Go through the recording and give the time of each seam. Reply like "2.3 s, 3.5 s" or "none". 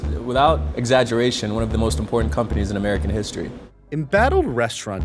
none